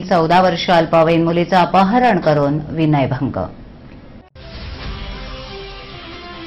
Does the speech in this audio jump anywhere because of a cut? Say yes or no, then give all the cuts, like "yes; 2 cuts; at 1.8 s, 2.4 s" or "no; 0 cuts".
yes; 1 cut; at 4.1 s